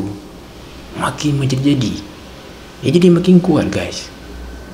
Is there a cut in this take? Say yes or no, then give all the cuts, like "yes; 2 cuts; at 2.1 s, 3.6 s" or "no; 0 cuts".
no; 0 cuts